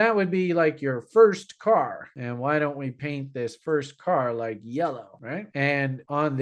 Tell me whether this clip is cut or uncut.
uncut